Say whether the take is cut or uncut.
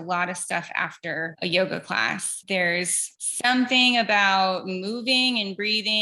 uncut